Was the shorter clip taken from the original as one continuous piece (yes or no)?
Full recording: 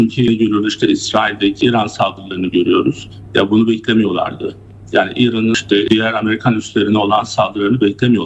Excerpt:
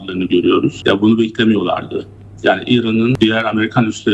no